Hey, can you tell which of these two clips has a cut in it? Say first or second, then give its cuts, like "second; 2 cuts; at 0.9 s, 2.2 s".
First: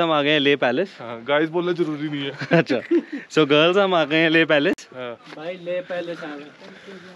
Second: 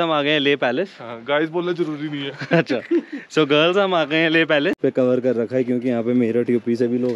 second; 1 cut; at 4.8 s